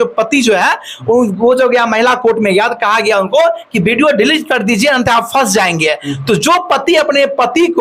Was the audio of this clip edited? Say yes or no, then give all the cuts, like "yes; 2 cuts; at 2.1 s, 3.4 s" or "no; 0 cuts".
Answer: no; 0 cuts